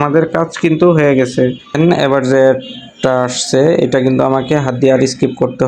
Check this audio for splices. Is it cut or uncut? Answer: cut